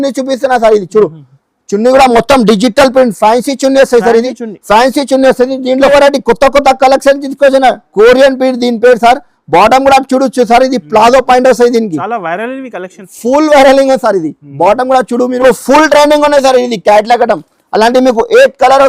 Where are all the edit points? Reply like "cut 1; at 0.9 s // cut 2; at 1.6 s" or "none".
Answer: cut 1; at 5.9 s // cut 2; at 15.4 s